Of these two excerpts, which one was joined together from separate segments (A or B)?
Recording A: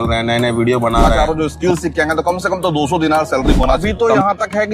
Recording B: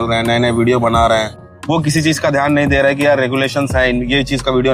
A